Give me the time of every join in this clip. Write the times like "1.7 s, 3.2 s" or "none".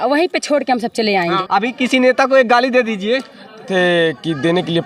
1.4 s, 3.7 s